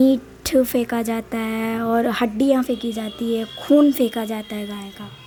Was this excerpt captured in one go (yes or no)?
yes